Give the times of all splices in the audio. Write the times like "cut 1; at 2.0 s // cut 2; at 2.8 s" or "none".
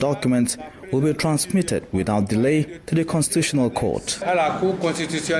cut 1; at 4.2 s